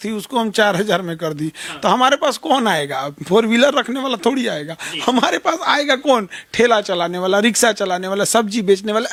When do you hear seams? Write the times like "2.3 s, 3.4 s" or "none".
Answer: none